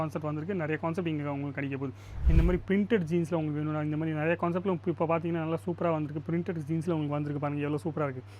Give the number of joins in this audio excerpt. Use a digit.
1